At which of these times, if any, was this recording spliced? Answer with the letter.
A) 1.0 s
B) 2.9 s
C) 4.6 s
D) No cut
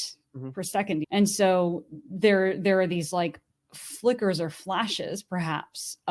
A